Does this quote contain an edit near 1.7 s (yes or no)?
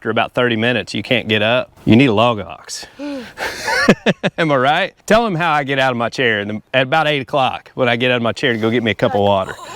yes